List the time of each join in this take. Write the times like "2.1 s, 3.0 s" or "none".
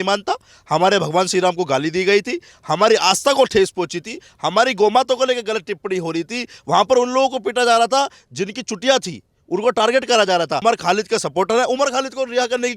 10.6 s